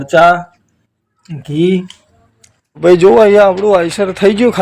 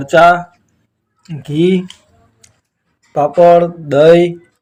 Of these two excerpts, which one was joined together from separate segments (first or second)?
first